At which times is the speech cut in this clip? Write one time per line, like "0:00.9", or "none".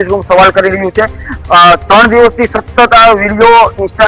none

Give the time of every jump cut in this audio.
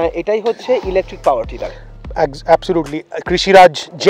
none

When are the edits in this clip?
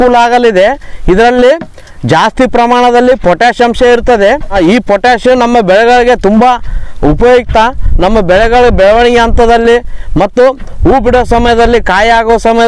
0:04.6

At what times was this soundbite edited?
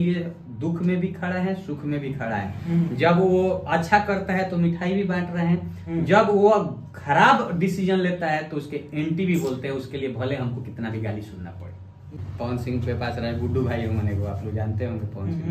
0:12.2

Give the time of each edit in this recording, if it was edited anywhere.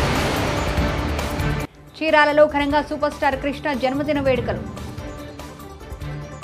0:01.5

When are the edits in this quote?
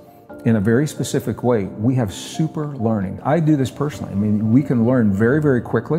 0:03.2

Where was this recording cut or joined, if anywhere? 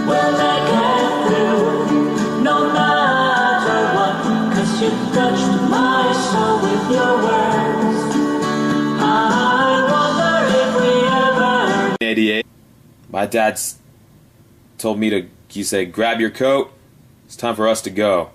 none

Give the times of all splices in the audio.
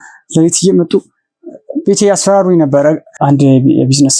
0:03.1

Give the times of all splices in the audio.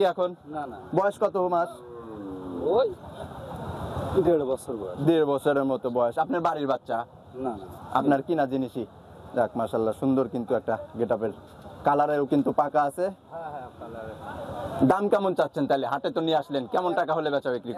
none

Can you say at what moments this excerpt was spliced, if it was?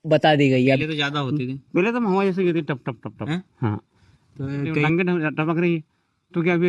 0:00.8
0:04.9

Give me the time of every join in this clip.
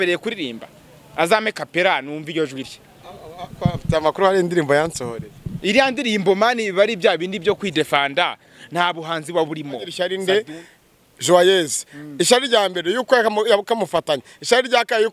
0:09.9

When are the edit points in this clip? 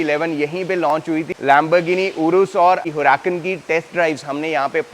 0:01.3
0:02.8

